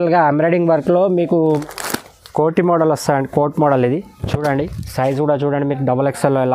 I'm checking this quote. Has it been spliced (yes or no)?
yes